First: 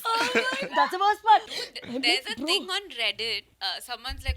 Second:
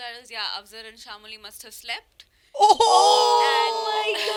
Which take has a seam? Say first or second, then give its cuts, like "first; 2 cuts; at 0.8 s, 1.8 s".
first; 2 cuts; at 1.5 s, 3.5 s